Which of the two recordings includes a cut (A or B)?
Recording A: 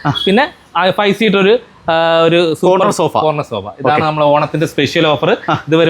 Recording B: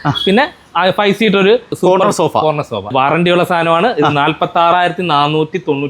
B